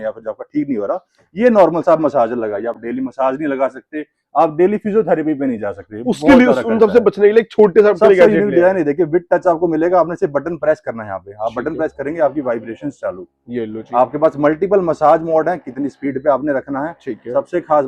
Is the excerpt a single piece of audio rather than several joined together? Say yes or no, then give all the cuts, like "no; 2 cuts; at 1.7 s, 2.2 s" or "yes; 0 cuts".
yes; 0 cuts